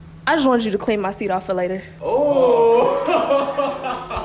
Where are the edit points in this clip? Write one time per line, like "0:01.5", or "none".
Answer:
0:01.9